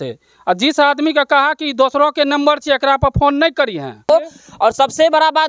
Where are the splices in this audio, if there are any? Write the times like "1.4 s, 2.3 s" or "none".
4.0 s